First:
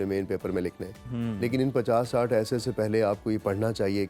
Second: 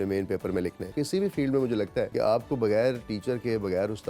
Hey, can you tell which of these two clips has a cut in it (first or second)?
second